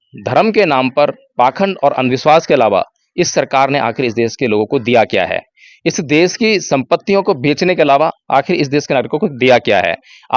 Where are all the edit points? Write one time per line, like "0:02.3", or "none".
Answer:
none

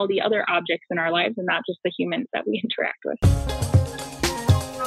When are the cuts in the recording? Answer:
0:03.2

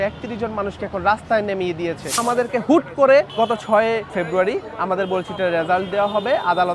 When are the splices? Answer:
0:02.2
0:03.7

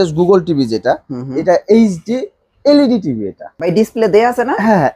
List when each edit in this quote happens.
0:03.5

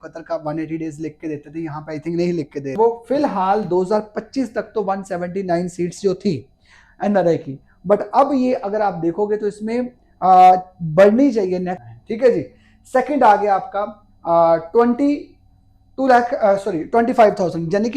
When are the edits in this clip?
0:02.8
0:11.9

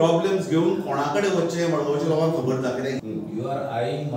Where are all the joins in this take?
0:03.0

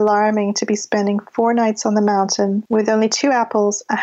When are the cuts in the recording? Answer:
0:02.6

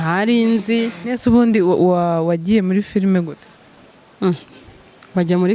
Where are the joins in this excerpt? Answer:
0:01.0

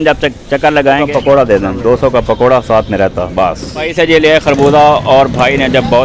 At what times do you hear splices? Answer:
0:01.0
0:03.9

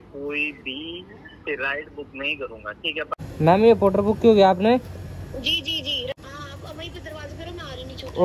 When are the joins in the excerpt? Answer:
0:03.2
0:06.1

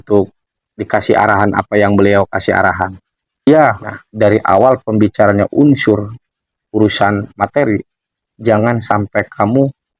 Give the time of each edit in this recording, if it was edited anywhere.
0:03.5

